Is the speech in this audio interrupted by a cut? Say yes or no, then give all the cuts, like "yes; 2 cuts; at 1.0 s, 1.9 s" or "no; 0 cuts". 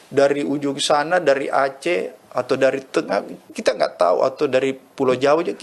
no; 0 cuts